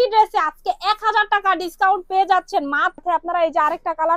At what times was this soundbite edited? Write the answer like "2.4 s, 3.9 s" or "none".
3.0 s

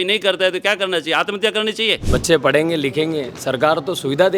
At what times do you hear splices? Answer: 2.0 s

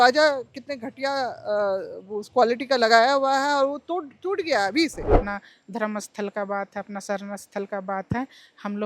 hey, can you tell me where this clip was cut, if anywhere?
5.2 s

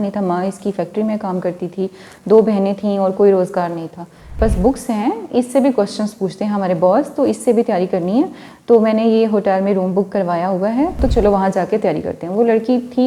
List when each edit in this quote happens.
4.4 s, 11.0 s

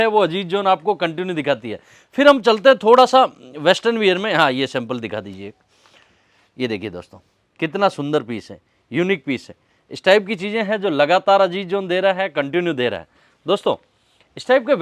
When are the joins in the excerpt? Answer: none

